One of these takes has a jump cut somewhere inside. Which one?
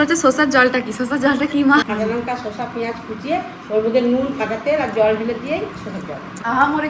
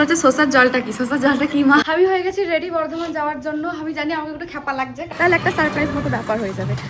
second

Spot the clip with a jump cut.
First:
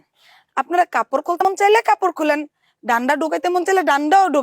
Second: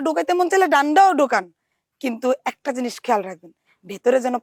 first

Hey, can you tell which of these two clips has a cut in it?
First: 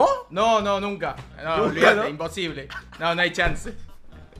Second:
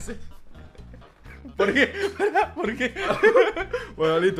first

